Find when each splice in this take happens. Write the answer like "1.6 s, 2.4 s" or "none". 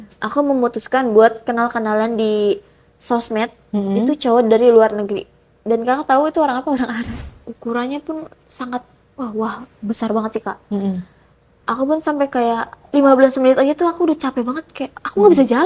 7.1 s